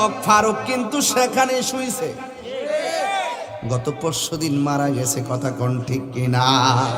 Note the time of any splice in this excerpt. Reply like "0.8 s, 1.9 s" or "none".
none